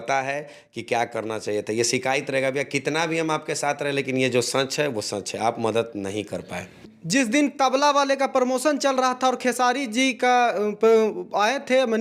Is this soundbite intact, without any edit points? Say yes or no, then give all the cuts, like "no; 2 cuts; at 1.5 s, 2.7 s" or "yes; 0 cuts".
yes; 0 cuts